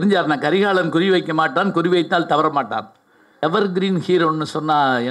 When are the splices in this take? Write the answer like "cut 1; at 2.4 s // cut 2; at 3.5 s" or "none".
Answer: cut 1; at 3.4 s